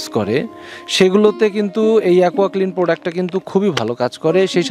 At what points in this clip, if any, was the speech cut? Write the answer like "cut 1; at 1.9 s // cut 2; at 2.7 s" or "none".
none